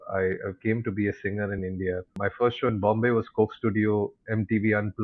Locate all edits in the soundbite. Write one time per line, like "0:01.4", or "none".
0:02.1

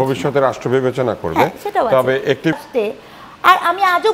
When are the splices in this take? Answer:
0:02.6

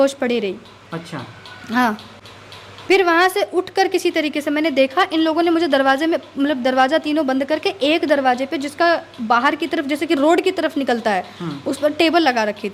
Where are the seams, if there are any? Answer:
none

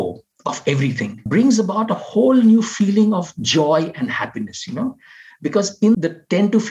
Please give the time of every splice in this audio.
0:01.2
0:06.0

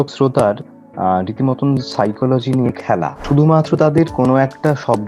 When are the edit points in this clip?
0:03.2

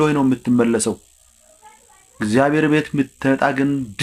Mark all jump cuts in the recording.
none

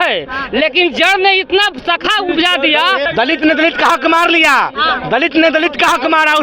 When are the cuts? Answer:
0:03.0

